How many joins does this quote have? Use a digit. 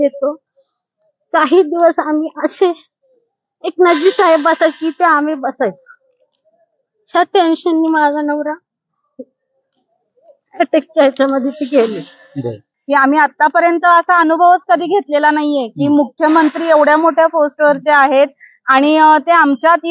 1